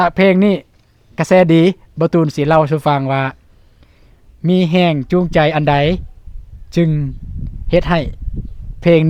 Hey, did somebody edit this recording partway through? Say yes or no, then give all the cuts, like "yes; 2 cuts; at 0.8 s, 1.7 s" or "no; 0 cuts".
no; 0 cuts